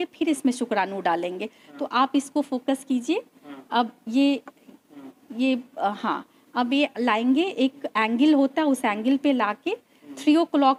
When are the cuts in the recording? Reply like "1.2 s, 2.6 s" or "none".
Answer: none